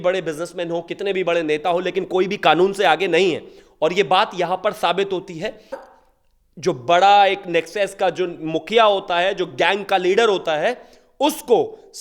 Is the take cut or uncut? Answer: cut